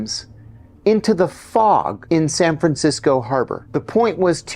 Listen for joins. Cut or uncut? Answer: cut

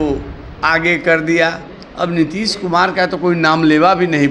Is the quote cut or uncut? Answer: uncut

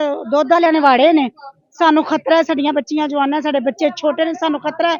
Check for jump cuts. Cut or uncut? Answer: uncut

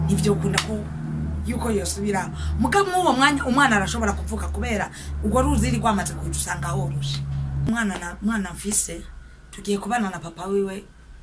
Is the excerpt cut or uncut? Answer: cut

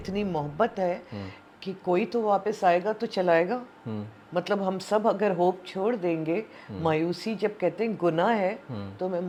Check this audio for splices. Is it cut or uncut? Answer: uncut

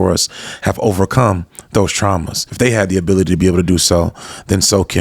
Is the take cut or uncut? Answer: cut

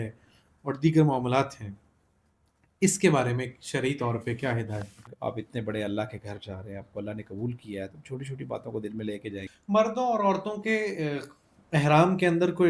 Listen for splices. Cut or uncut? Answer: cut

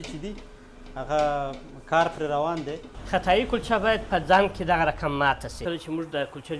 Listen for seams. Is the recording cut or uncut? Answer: cut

